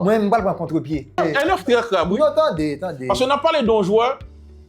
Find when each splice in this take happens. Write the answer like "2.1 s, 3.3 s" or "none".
1.1 s